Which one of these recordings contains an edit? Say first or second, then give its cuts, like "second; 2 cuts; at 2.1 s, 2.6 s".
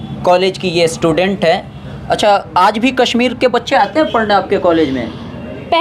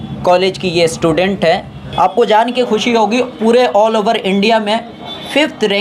second; 1 cut; at 1.8 s